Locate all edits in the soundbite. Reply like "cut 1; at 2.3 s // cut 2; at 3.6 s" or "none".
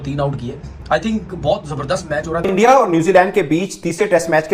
cut 1; at 2.4 s